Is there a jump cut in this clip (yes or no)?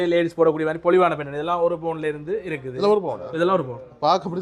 no